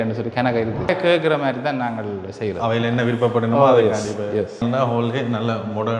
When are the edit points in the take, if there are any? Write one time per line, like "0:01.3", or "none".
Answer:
0:00.9
0:04.6

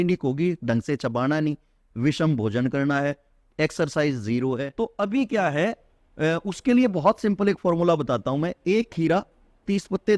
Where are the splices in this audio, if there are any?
0:04.7

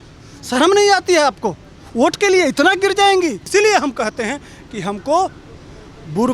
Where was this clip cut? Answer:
0:03.4

